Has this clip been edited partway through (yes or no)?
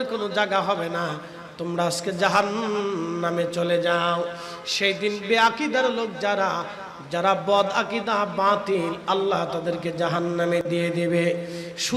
no